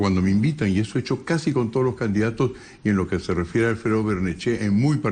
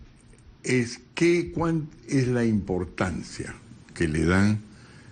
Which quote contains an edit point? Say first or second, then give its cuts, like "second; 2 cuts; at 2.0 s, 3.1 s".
first; 1 cut; at 1.8 s